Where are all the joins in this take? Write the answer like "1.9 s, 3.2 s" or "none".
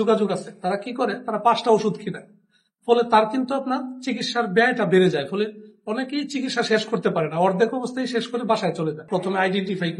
9.0 s